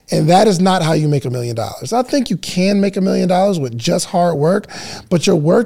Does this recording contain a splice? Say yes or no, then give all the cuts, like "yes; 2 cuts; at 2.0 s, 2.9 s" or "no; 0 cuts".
no; 0 cuts